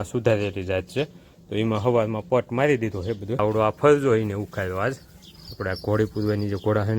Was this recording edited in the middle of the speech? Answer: yes; 1 cut; at 3.4 s

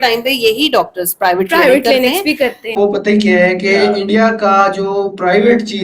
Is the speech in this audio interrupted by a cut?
yes; 1 cut; at 2.6 s

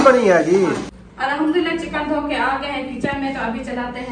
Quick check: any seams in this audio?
yes; 1 cut; at 1.0 s

